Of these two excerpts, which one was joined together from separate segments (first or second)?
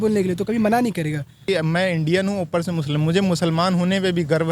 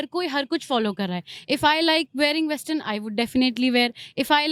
first